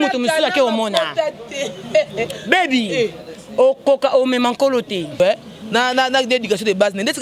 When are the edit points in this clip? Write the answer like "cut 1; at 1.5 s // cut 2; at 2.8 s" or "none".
cut 1; at 5.2 s